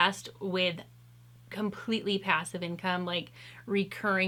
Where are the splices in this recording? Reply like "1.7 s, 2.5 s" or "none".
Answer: none